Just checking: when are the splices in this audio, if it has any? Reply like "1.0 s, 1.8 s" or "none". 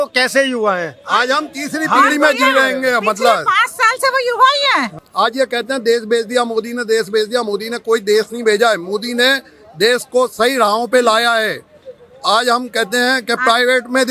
5.0 s